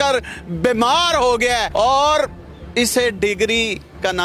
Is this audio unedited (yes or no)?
no